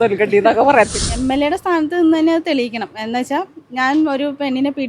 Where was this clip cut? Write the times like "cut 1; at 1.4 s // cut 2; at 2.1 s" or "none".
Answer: cut 1; at 1.0 s